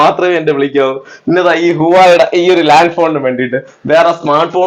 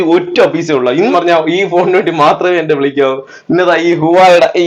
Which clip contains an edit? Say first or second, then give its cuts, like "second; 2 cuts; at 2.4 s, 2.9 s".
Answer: second; 1 cut; at 1.1 s